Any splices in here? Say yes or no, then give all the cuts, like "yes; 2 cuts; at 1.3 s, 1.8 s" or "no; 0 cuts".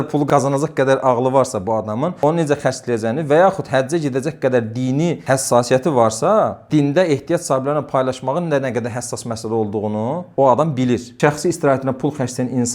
yes; 1 cut; at 11.1 s